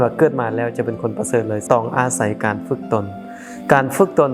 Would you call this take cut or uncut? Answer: cut